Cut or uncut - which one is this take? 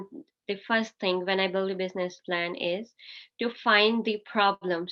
uncut